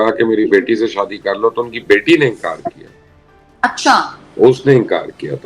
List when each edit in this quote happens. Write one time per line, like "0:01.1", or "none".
none